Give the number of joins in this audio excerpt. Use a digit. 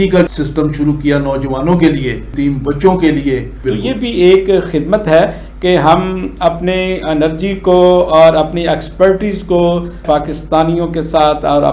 2